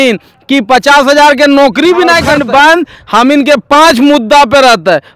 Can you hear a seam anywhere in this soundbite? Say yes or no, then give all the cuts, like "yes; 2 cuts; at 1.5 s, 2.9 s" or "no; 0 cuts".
yes; 1 cut; at 2.2 s